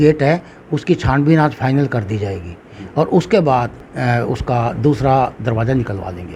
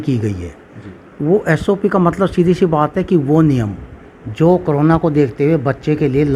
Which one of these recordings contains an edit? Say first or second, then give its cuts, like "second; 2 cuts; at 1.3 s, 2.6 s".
first; 1 cut; at 3.8 s